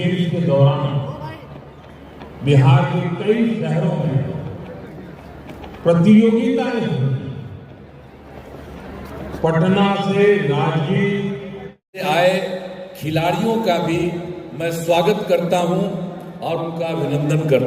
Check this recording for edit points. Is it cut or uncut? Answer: cut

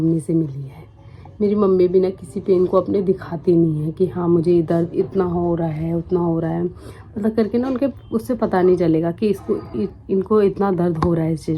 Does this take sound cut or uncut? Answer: uncut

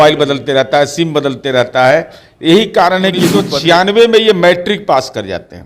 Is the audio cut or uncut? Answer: cut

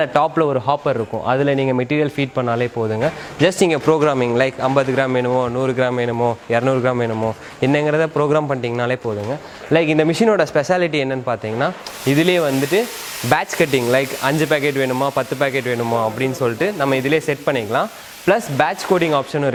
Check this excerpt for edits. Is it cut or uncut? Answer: uncut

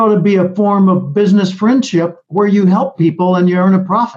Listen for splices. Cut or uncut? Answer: uncut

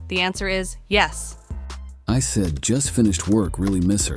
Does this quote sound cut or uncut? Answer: cut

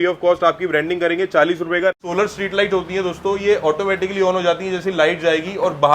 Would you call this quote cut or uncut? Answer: cut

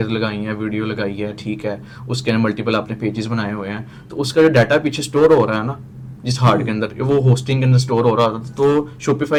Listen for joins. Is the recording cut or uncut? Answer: uncut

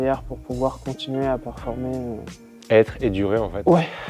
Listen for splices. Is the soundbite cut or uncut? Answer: uncut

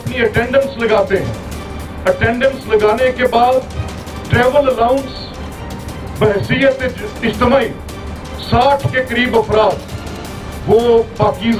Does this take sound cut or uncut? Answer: uncut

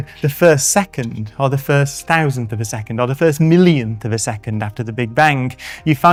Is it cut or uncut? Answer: uncut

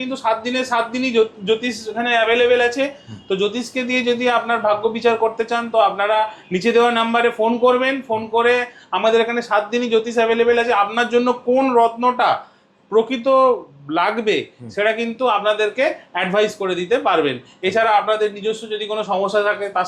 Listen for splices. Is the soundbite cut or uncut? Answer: uncut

